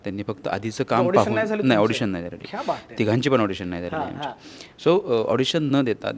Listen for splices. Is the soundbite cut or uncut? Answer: uncut